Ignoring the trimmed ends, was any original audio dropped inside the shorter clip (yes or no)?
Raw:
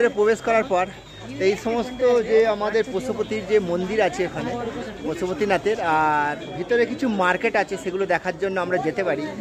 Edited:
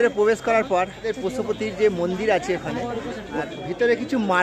yes